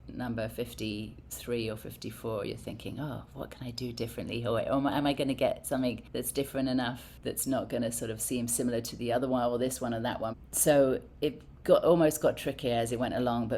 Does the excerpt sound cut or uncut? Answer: cut